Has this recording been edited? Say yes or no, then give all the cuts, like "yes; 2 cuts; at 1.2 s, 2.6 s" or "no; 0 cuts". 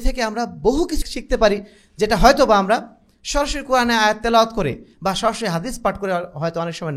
yes; 1 cut; at 1.1 s